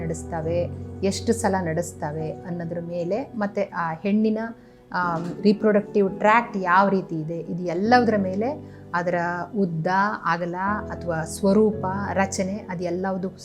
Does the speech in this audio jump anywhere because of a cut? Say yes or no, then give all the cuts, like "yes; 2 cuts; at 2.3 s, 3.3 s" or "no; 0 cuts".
no; 0 cuts